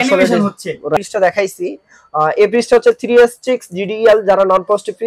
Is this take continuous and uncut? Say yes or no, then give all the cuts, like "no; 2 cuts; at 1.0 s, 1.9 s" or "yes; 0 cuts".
no; 1 cut; at 1.0 s